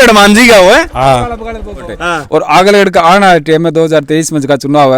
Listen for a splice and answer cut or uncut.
cut